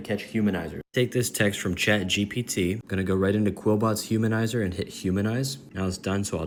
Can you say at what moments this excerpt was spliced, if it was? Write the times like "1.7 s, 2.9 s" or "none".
none

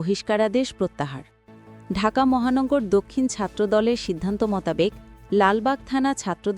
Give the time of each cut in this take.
none

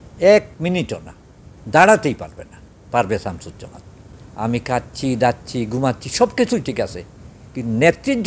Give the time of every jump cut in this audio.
4.1 s

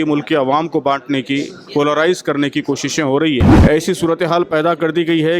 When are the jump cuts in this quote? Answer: 3.5 s

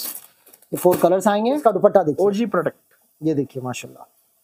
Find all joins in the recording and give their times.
1.6 s

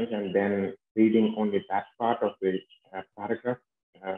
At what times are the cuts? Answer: none

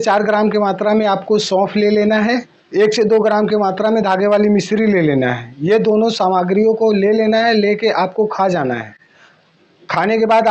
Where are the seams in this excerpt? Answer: 2.6 s

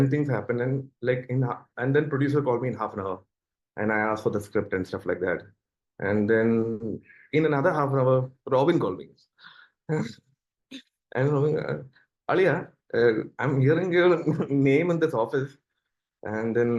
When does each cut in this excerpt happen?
none

